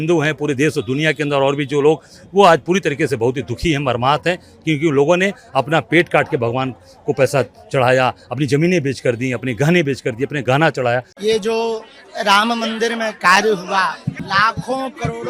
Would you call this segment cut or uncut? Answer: cut